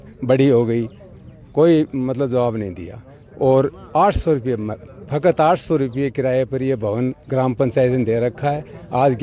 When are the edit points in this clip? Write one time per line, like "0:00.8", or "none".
none

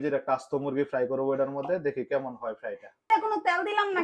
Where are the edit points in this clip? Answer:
0:02.9

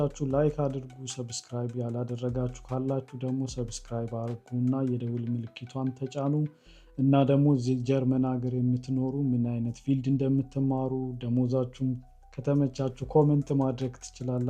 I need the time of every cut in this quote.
none

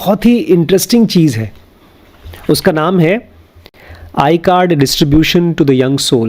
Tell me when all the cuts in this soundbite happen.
none

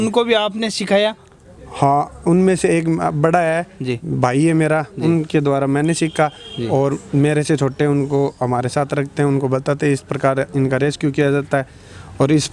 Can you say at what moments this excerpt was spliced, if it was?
none

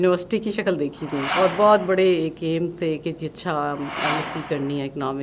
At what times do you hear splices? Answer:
0:01.3

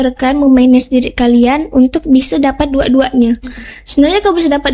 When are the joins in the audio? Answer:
none

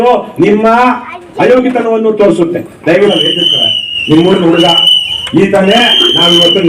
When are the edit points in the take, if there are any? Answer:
0:03.1

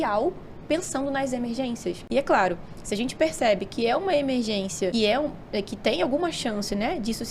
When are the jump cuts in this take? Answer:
0:02.0
0:04.9

